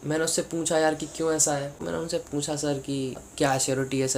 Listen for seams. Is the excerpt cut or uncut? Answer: cut